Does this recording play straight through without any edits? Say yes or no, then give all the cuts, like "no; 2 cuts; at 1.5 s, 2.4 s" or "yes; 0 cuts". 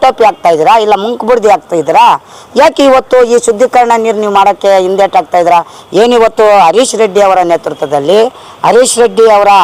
yes; 0 cuts